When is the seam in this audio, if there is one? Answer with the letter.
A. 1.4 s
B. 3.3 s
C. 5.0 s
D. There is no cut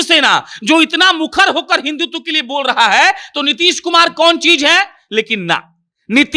D